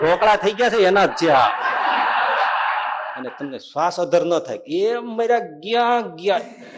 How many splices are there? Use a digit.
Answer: 1